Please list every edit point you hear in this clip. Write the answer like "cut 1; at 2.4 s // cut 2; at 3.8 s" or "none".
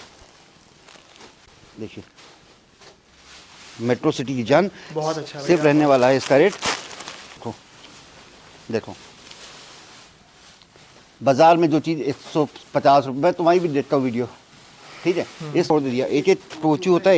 cut 1; at 7.4 s // cut 2; at 15.7 s